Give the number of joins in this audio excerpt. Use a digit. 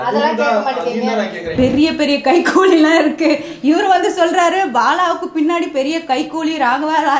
1